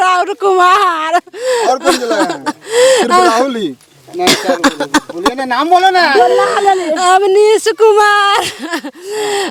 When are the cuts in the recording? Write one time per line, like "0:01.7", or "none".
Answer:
none